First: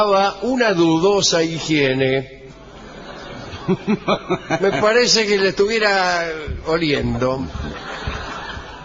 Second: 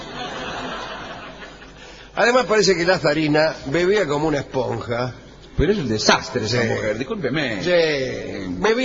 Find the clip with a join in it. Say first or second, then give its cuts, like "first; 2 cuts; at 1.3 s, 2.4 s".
first; 1 cut; at 7.3 s